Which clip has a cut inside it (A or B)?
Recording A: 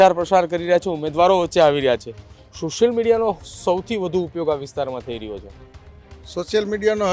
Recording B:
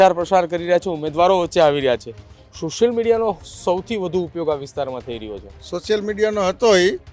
B